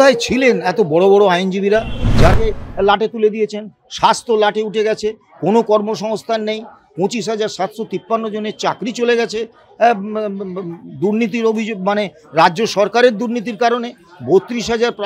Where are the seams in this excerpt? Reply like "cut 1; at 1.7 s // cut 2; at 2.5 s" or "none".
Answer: cut 1; at 2.3 s